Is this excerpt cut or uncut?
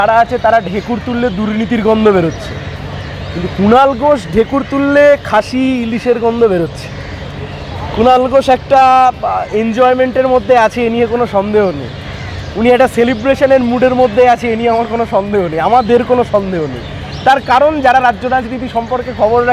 uncut